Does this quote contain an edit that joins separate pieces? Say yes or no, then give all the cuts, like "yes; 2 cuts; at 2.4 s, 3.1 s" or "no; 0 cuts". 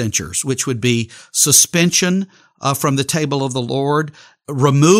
no; 0 cuts